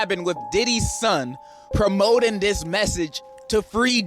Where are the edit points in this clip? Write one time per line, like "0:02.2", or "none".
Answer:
0:01.6